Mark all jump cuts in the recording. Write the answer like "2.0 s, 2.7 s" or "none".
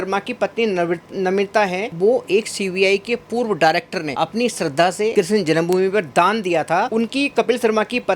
1.9 s, 4.1 s, 5.1 s, 6.9 s